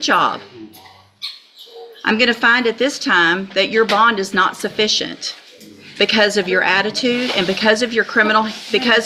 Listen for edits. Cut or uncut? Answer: uncut